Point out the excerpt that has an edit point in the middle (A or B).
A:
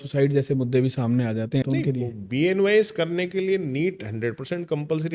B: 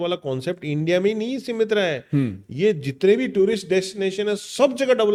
A